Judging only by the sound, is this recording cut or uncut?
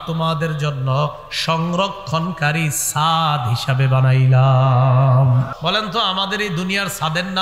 cut